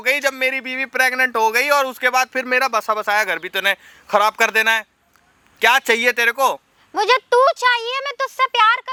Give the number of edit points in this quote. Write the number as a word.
zero